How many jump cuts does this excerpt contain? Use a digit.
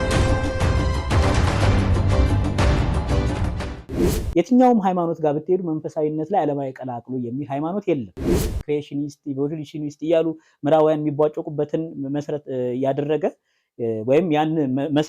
1